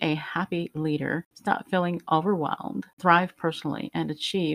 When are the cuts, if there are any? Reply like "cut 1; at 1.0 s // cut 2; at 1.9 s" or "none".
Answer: cut 1; at 1.3 s // cut 2; at 2.9 s